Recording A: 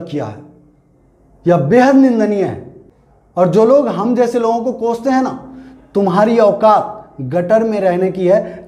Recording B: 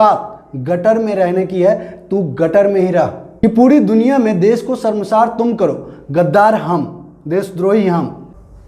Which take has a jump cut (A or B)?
B